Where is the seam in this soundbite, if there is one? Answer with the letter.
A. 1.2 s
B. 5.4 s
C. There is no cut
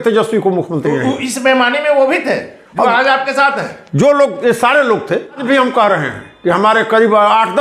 B